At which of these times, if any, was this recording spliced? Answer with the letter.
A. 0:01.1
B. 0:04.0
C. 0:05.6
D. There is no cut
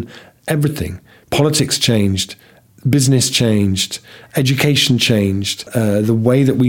C